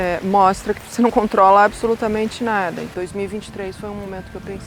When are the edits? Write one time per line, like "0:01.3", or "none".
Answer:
0:02.9